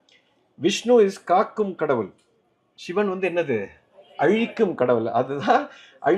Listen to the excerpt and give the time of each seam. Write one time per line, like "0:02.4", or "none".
none